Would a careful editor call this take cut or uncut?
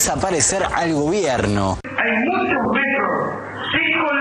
cut